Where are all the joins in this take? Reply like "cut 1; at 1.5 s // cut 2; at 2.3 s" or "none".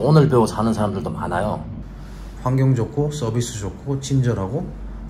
cut 1; at 1.7 s